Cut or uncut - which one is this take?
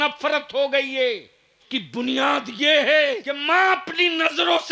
cut